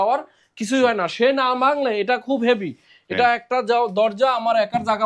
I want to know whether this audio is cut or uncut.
uncut